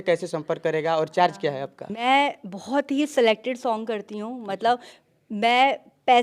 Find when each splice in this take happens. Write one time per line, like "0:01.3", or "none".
0:02.0